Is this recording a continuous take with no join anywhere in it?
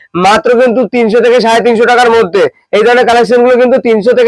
no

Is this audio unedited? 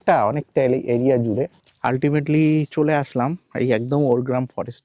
no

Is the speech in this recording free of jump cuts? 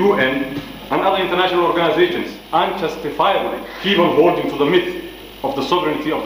no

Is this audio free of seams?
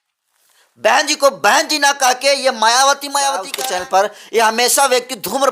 no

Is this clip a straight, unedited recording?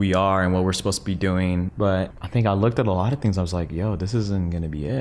no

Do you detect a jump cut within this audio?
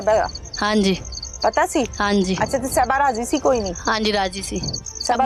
no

